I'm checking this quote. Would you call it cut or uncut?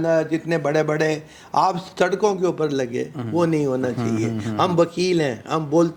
uncut